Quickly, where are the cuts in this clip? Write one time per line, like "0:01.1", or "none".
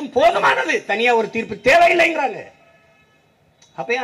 none